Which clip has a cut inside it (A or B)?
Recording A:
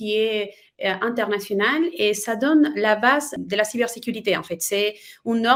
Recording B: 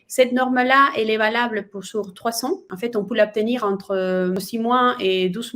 B